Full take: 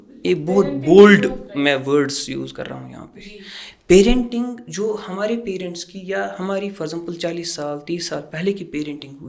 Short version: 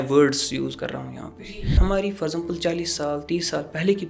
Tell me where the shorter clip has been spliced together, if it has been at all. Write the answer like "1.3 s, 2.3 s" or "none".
1.8 s